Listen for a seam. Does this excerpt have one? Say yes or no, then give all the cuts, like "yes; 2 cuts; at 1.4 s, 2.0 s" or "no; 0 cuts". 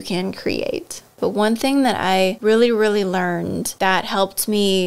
yes; 3 cuts; at 1.0 s, 2.4 s, 3.7 s